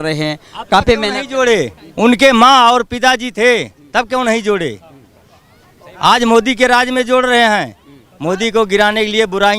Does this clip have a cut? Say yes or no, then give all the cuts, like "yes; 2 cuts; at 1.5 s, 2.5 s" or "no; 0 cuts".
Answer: no; 0 cuts